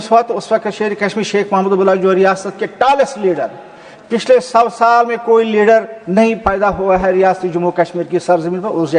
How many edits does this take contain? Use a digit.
0